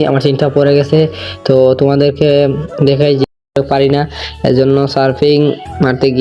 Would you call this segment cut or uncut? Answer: cut